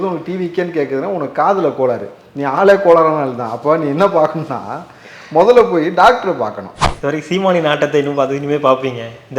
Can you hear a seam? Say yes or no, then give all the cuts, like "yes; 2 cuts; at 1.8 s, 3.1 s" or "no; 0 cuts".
yes; 1 cut; at 6.8 s